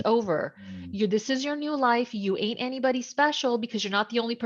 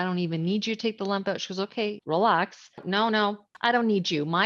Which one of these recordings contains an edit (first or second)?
second